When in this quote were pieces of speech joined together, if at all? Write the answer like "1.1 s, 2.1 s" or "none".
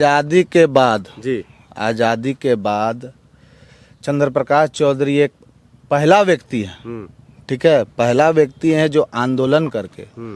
none